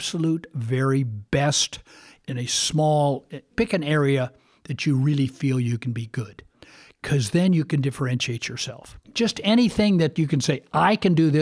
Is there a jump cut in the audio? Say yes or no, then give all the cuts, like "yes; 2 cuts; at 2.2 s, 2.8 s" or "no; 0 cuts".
yes; 1 cut; at 9.0 s